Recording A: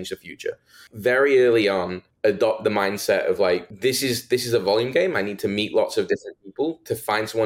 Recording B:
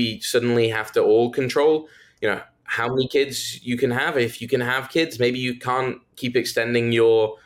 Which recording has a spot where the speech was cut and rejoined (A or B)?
A